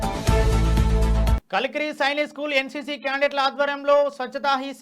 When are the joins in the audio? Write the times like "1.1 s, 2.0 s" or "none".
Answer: 1.4 s